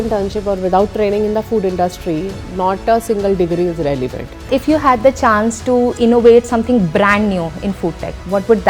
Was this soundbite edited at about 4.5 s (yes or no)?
yes